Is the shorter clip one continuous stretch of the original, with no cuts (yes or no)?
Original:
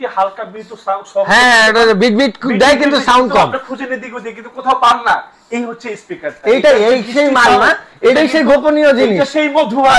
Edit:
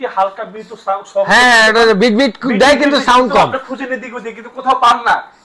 yes